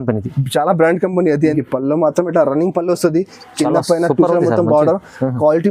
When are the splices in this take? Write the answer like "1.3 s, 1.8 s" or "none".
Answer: 1.5 s